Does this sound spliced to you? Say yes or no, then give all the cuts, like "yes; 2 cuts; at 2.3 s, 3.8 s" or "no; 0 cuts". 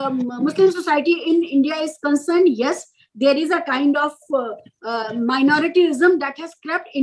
no; 0 cuts